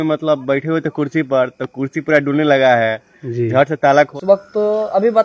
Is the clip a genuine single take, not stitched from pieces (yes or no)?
no